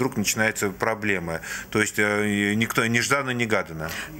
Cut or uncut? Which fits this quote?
uncut